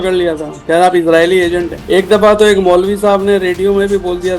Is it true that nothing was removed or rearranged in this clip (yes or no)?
no